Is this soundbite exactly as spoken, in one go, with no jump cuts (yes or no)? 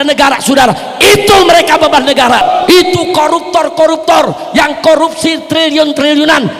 no